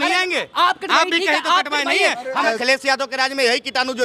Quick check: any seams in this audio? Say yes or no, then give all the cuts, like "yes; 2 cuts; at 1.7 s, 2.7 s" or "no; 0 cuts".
yes; 1 cut; at 2.6 s